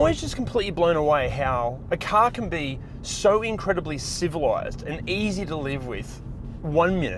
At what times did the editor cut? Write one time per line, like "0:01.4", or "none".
none